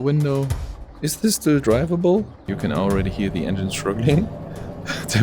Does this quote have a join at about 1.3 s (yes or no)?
no